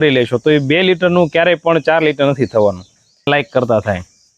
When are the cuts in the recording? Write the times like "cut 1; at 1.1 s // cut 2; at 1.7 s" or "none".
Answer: cut 1; at 3.3 s